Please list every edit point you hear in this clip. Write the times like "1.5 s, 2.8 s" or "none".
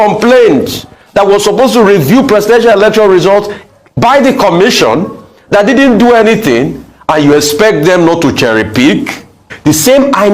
9.4 s